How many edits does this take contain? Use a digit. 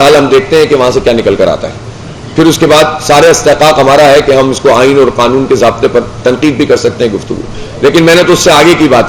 0